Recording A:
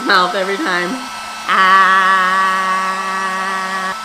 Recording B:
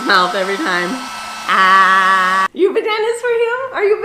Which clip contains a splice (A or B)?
B